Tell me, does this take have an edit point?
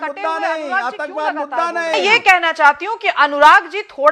yes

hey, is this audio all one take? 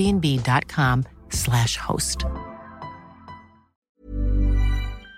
no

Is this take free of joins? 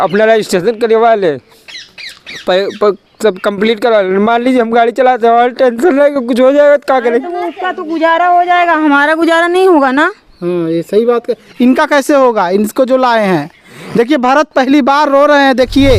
yes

